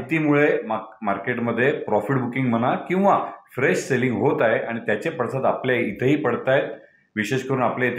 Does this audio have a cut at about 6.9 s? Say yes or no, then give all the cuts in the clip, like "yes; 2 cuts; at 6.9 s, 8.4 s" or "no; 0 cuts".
no; 0 cuts